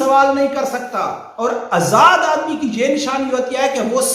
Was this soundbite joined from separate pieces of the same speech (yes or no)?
yes